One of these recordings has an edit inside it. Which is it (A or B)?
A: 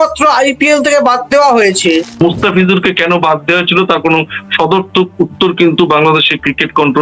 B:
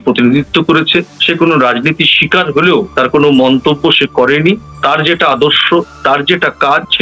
A